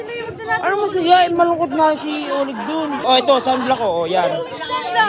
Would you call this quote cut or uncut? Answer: cut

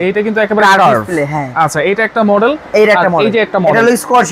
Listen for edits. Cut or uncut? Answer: uncut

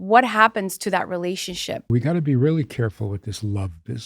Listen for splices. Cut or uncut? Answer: cut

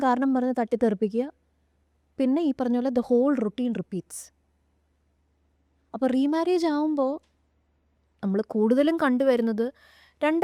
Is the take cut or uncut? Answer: uncut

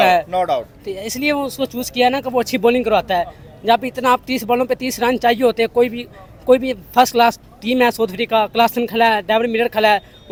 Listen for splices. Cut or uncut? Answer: uncut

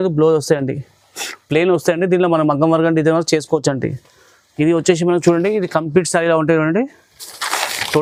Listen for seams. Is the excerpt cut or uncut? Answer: uncut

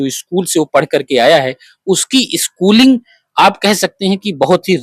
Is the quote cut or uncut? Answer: uncut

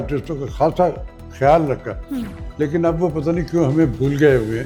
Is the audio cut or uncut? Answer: uncut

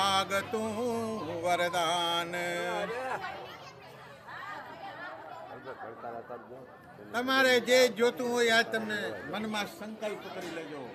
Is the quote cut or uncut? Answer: uncut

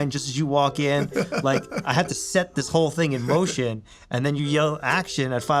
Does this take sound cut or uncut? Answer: uncut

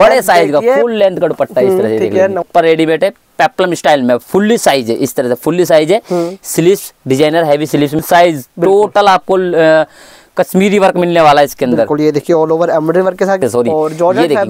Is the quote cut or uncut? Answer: cut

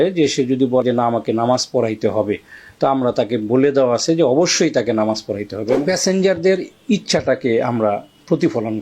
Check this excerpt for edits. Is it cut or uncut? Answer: cut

